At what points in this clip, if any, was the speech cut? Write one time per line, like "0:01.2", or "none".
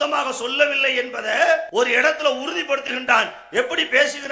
0:01.7